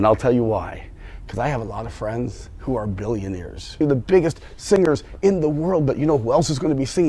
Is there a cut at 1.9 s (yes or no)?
no